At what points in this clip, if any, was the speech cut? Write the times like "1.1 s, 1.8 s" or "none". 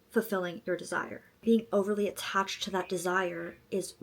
1.4 s